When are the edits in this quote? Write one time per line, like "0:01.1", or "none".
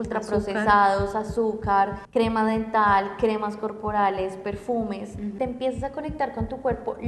0:02.0
0:05.3